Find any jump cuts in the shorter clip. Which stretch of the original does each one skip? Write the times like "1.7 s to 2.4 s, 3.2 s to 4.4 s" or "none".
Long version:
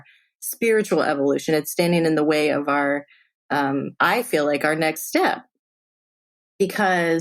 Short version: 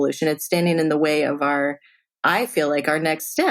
3.4 s to 3.9 s

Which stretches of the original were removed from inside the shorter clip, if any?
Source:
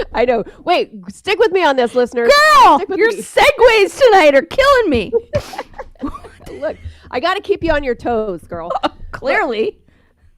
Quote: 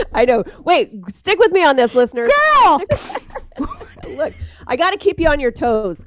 2.8 s to 5.3 s

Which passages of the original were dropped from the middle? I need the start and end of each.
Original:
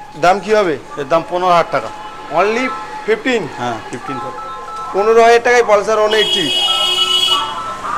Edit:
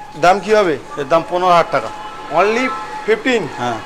none

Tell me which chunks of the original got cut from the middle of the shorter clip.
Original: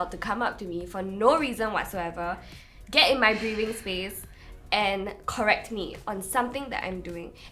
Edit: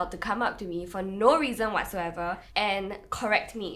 2.4 s to 4.6 s

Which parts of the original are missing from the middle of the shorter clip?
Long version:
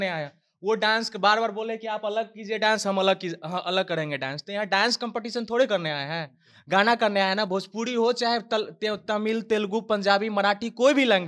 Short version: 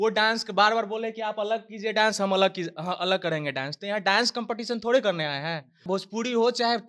6.5 s to 7.5 s

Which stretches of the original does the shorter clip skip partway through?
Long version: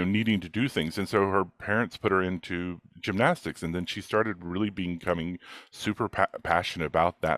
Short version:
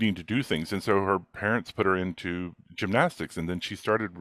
none

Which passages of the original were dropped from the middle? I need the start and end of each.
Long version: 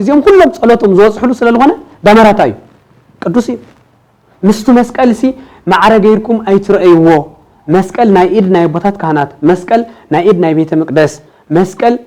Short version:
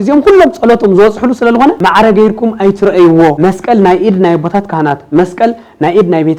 1.8 s to 5.7 s, 7.2 s to 7.7 s

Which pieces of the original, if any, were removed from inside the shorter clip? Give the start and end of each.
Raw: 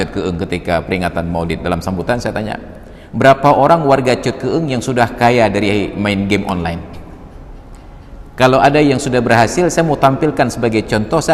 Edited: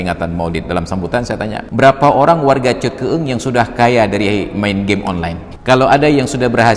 2.6 s to 3.1 s, 6.9 s to 8.2 s

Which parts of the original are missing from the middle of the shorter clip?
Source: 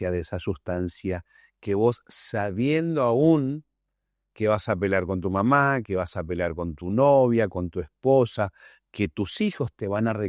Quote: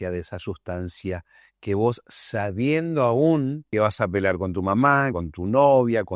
3.6 s to 4.3 s, 5.8 s to 6.6 s

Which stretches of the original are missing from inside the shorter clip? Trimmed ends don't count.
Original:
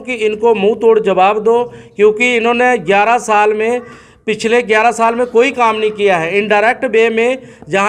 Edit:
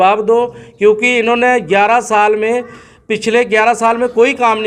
none

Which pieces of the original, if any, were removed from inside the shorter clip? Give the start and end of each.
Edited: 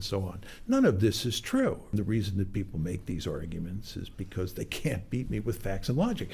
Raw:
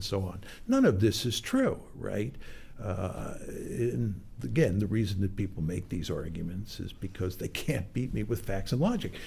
1.9 s to 4.7 s

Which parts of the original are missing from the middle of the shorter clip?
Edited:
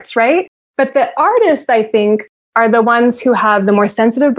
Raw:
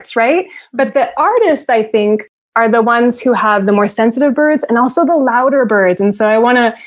none

